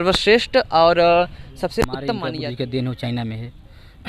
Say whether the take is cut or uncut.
cut